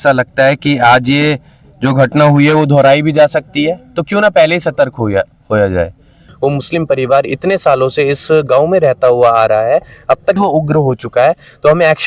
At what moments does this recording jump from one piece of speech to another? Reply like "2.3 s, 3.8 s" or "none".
6.2 s, 10.4 s

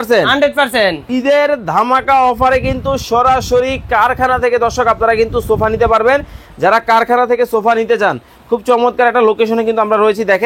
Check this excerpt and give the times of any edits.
1.1 s

